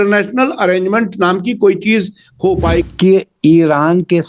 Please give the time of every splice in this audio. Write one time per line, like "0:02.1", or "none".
0:02.9